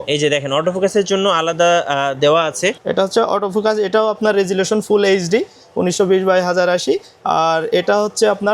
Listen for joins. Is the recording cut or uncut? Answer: uncut